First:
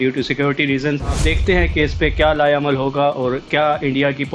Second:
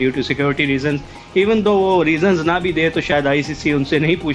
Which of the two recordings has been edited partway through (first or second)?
first